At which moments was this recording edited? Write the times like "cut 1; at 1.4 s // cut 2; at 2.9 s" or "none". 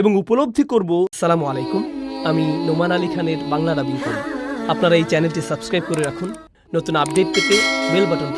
cut 1; at 1.1 s